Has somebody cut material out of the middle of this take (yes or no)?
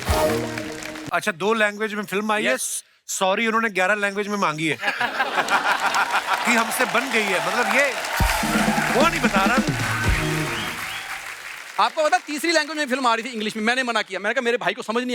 yes